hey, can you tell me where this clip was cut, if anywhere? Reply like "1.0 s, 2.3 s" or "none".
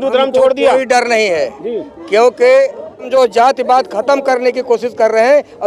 3.1 s